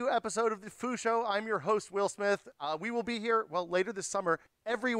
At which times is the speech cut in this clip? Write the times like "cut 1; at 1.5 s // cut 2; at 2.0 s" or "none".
cut 1; at 2.5 s

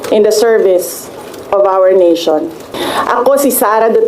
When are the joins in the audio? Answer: cut 1; at 2.7 s

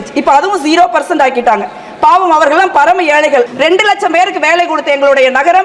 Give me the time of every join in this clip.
cut 1; at 3.5 s

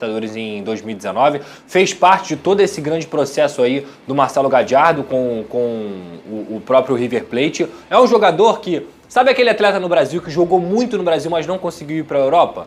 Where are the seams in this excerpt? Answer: none

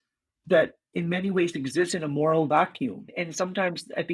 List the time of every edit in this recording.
cut 1; at 3.1 s

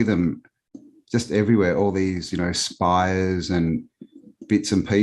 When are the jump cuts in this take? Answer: none

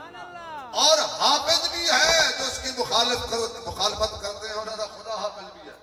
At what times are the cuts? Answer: none

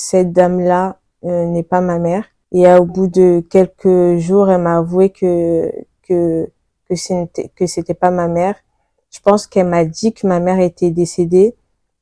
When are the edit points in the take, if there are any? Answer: cut 1; at 2.4 s

